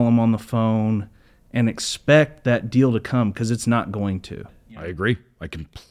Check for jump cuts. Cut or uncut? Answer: cut